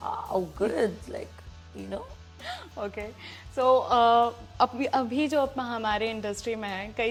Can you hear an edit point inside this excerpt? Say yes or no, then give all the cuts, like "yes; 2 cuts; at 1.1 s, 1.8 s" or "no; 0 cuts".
no; 0 cuts